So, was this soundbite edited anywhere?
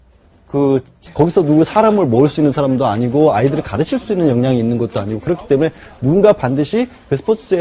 no; 0 cuts

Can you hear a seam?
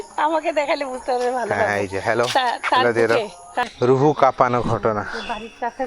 yes; 1 cut; at 3.7 s

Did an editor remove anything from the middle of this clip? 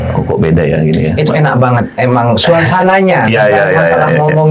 no; 0 cuts

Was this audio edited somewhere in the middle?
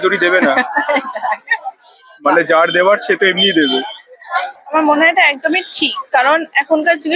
no; 0 cuts

